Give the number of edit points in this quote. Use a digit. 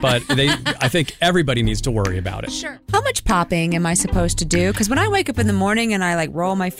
1